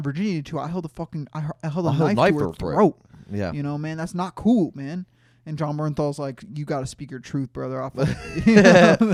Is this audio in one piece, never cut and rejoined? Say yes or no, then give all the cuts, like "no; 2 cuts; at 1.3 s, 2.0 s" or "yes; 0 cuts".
yes; 0 cuts